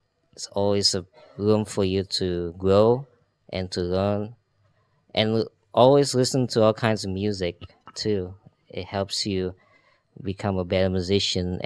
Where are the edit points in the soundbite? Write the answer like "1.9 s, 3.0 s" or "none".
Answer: none